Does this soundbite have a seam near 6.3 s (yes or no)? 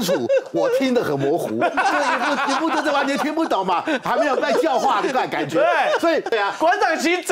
yes